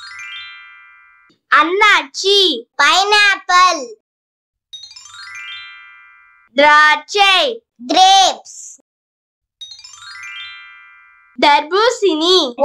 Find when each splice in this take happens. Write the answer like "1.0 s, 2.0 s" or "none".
1.1 s, 4.8 s, 6.3 s